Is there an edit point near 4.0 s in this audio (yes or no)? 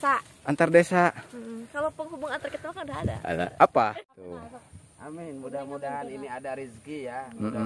yes